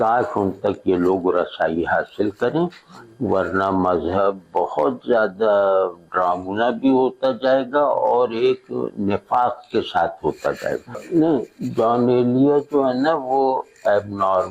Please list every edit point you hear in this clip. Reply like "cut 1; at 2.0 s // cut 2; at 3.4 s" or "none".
cut 1; at 11.0 s